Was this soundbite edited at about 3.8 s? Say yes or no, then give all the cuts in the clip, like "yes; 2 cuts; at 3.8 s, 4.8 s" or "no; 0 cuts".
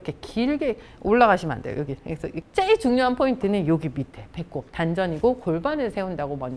no; 1 cut; at 2.3 s